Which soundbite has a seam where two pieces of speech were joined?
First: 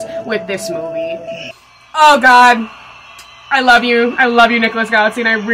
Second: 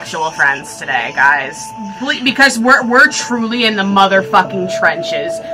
first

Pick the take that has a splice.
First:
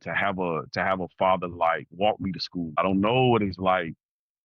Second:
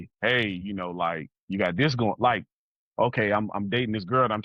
first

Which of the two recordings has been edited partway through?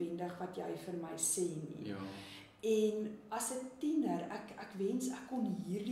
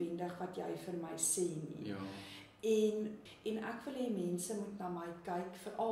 second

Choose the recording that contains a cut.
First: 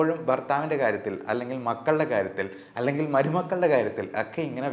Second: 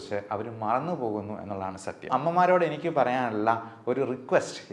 second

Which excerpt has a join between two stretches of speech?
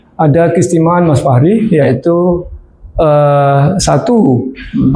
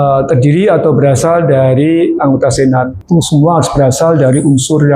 second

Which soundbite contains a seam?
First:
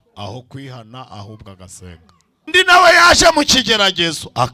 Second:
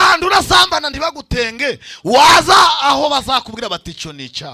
first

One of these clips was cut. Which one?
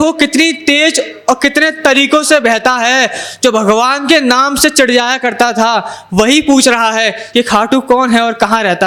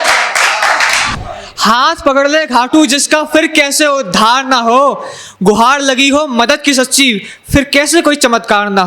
second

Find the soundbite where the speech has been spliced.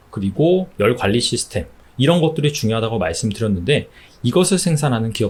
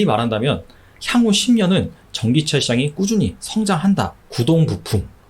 second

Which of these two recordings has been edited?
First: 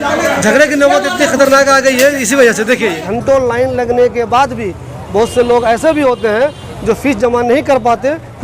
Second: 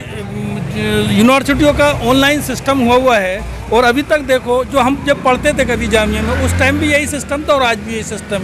first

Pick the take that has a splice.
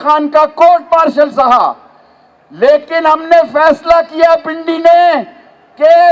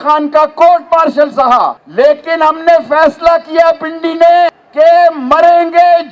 second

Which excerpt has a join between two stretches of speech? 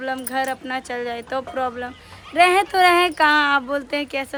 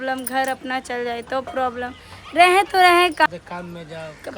second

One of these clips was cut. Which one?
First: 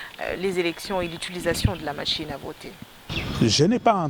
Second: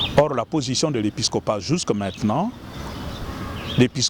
first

